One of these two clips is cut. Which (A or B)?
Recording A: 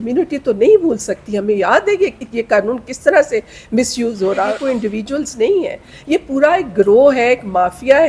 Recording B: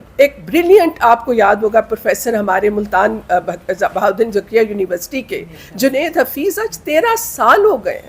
A